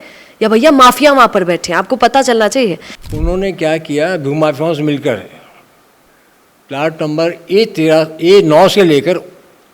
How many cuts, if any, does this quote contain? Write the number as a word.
one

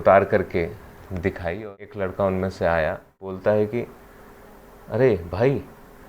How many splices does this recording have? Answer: two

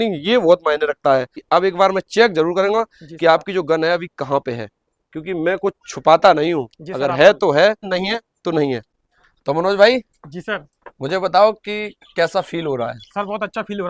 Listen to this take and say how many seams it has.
three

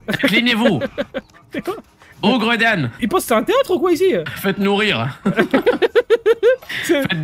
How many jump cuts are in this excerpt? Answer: two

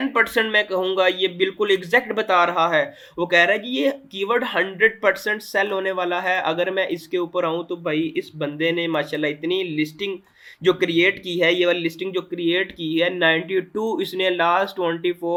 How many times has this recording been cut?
zero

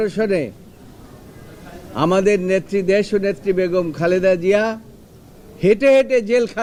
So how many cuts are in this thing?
zero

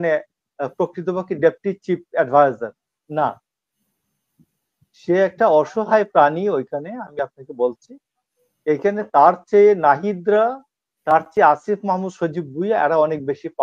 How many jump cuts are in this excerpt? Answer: zero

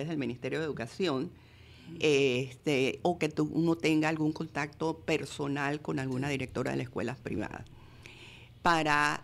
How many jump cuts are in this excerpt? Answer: zero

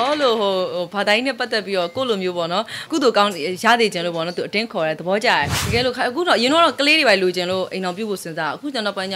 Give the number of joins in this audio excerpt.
two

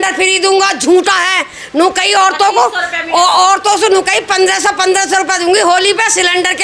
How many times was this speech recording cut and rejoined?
zero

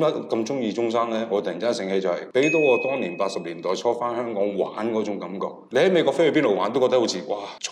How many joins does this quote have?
two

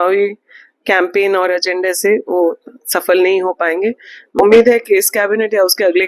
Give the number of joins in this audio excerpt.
one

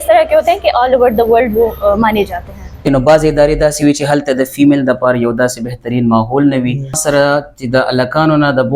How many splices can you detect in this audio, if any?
two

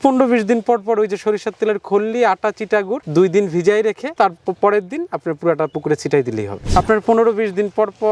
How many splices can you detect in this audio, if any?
one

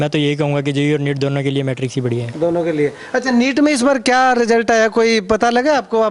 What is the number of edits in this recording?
zero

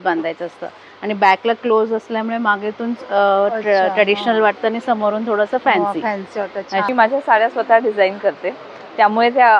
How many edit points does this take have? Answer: one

